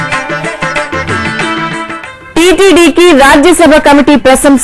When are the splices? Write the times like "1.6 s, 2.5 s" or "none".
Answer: 2.0 s